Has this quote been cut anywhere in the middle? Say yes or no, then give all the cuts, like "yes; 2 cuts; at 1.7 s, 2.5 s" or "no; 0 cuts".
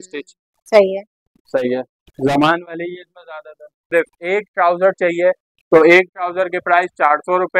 yes; 1 cut; at 3.9 s